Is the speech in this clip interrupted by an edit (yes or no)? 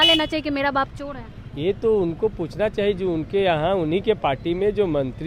no